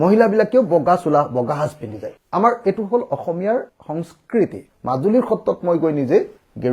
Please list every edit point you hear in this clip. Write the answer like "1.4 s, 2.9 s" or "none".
4.7 s